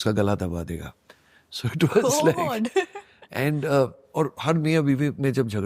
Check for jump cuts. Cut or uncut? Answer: uncut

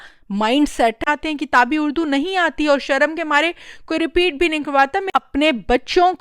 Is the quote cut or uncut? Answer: cut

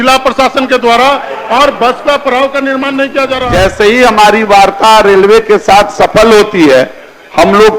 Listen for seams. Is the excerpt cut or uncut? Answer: cut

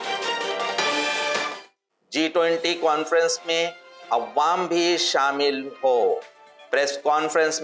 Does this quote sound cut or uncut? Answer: cut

